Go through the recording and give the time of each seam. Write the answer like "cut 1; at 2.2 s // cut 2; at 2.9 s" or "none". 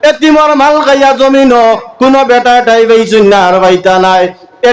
none